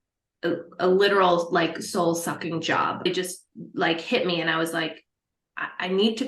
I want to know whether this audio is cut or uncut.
cut